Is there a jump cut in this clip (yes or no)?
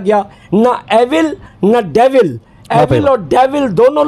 no